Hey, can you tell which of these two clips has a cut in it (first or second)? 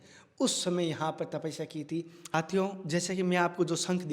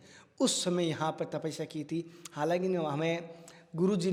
first